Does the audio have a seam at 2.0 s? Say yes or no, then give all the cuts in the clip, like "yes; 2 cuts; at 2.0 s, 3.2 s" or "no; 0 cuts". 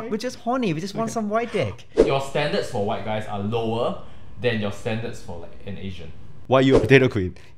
yes; 2 cuts; at 2.0 s, 6.3 s